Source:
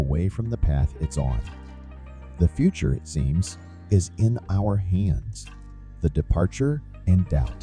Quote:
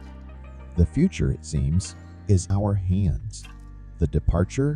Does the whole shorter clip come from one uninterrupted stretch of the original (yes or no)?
no